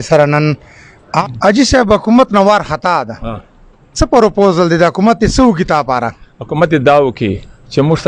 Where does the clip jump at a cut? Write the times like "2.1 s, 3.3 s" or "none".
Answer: 1.2 s